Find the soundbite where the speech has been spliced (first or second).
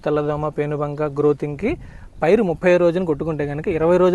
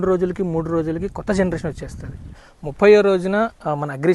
second